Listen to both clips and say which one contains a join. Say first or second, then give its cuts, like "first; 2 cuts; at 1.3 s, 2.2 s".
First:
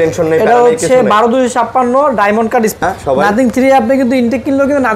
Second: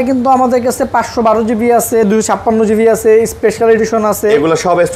first; 1 cut; at 2.8 s